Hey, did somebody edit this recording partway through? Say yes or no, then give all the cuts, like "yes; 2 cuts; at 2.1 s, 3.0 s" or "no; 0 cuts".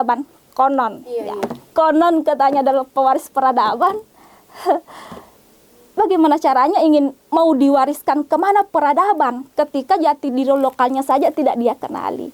no; 0 cuts